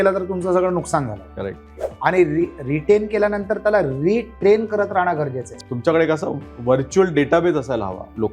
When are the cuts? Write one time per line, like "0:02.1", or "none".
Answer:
0:05.6